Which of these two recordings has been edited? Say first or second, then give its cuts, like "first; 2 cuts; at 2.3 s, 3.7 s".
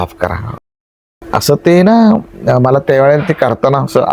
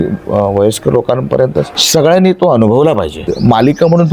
second; 2 cuts; at 1.8 s, 3.2 s